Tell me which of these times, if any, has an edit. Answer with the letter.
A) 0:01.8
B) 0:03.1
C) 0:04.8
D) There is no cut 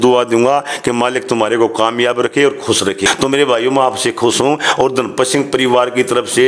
B